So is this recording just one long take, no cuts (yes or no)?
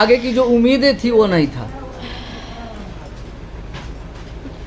yes